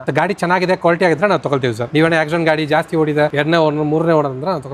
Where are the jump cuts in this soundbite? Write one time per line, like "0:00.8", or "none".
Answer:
none